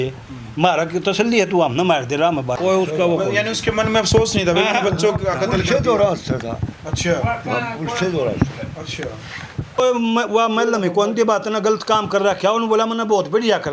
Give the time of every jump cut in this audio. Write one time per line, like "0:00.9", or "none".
0:02.6
0:09.8